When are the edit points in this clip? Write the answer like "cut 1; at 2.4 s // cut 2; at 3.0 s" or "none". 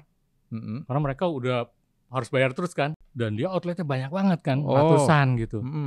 cut 1; at 3.0 s